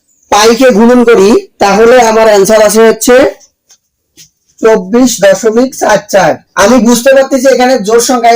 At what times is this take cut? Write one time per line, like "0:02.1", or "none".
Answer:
0:06.4